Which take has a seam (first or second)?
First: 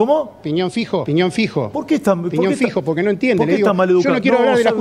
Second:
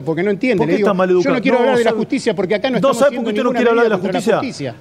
first